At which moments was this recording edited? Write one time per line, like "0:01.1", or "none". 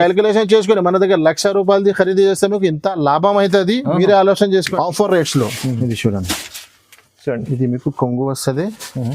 0:04.7